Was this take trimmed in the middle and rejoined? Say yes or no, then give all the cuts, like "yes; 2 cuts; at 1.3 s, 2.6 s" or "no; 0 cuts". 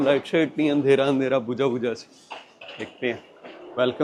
no; 0 cuts